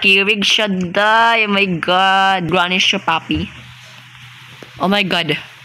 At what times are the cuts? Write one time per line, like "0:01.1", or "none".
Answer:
0:02.5